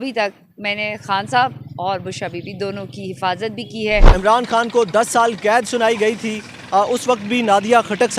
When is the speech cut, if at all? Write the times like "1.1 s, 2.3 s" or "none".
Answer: 4.1 s